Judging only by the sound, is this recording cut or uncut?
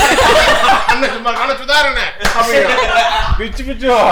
uncut